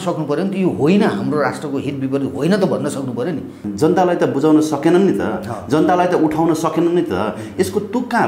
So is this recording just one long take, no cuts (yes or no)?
no